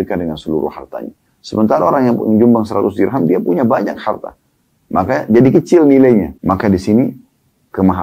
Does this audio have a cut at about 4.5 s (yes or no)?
no